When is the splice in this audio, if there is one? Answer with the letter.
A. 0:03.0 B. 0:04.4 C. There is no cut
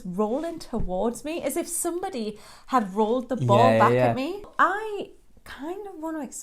B